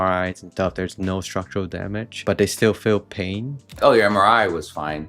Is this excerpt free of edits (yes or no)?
no